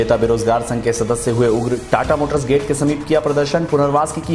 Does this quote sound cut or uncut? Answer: uncut